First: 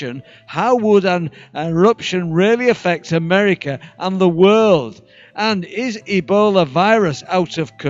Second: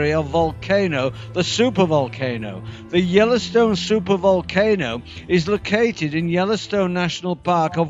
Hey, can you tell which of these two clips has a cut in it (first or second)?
first